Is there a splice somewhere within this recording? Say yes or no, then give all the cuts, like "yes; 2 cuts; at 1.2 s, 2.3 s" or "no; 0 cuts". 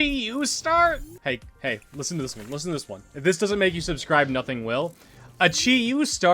yes; 1 cut; at 1.1 s